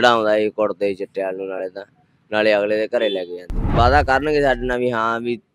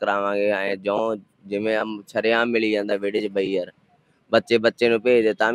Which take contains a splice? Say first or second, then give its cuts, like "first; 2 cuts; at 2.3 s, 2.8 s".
first; 1 cut; at 3.6 s